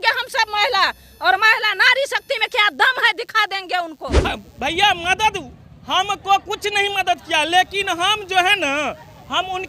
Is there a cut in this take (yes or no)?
yes